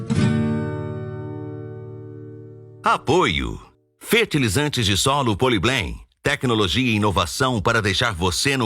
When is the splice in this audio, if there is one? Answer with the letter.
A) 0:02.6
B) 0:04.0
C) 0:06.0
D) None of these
A